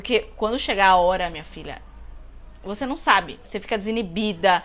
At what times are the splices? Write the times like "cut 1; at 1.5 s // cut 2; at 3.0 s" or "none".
none